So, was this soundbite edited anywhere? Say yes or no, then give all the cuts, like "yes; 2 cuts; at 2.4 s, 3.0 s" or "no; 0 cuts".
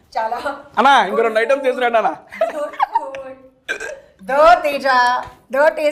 no; 0 cuts